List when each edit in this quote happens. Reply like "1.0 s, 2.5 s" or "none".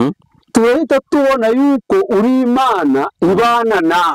none

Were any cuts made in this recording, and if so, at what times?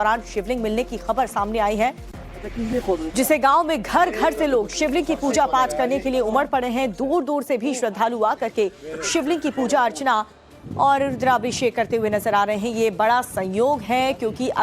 3.8 s

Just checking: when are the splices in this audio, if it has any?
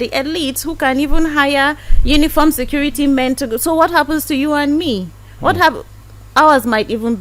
none

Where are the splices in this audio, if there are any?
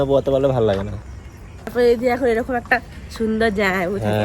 1.7 s

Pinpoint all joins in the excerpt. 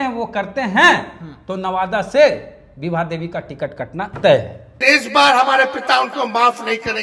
4.8 s

